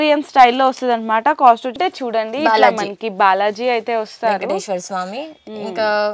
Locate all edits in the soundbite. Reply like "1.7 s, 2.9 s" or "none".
1.7 s